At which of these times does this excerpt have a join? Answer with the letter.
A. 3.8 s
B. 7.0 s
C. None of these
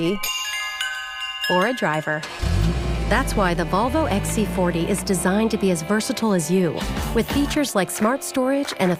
C